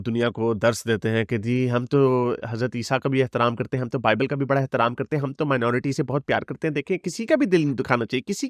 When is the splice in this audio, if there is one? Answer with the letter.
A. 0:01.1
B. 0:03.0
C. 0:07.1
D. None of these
D